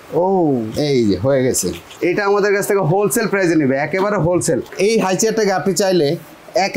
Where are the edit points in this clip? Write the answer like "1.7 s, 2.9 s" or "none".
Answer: 1.8 s, 4.7 s